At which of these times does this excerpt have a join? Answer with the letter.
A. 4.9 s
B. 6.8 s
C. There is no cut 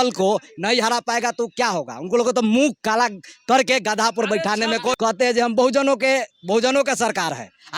A